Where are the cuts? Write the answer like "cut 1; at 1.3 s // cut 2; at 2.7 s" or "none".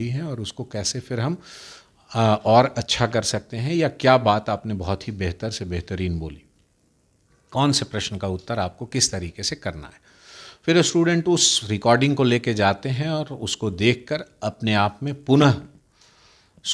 none